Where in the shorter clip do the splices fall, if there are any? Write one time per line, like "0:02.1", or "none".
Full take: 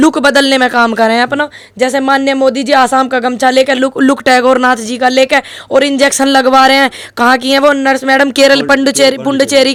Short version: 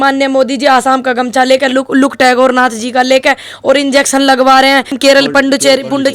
0:05.0